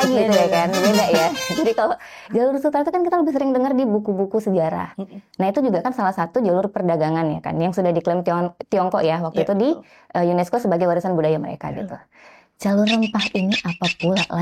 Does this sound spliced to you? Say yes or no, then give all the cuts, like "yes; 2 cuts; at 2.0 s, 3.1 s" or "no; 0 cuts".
no; 0 cuts